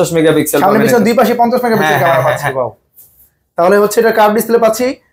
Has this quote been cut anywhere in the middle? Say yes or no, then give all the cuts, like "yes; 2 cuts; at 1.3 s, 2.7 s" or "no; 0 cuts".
no; 0 cuts